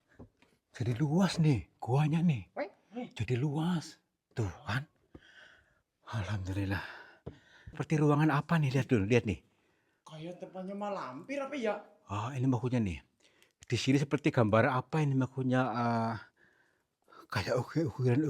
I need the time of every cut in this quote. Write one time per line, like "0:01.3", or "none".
0:07.8